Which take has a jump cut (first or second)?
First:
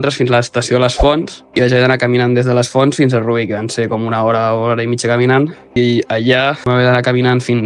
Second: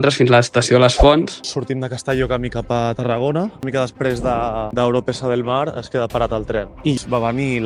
second